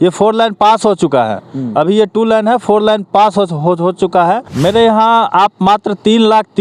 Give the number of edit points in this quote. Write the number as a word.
one